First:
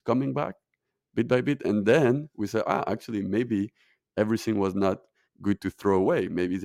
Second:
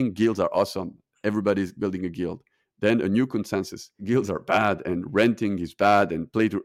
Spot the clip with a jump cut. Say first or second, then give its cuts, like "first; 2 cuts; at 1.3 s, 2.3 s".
second; 1 cut; at 3.9 s